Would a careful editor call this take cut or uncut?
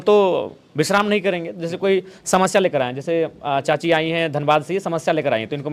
uncut